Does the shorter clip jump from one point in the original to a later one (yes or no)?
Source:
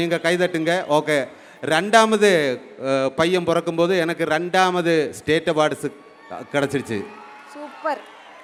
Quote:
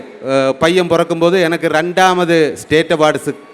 no